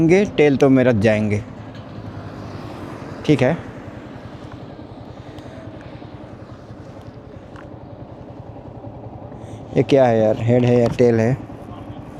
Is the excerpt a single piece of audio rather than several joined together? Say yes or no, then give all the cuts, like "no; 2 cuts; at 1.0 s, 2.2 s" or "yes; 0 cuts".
yes; 0 cuts